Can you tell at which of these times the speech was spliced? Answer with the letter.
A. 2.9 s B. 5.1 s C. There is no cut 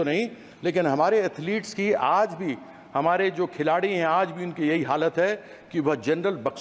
C